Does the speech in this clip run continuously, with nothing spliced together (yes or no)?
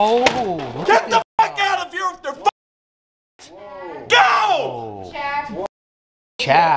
yes